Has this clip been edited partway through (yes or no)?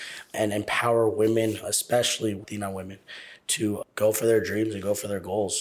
yes